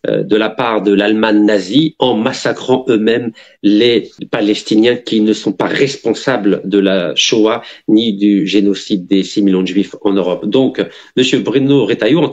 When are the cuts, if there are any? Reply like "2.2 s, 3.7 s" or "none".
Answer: 4.2 s